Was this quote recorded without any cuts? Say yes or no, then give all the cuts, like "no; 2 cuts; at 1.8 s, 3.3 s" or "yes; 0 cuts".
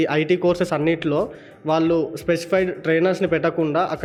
yes; 0 cuts